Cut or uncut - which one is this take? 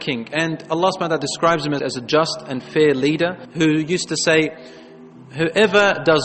cut